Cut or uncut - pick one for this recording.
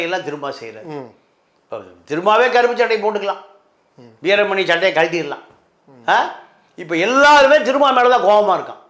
uncut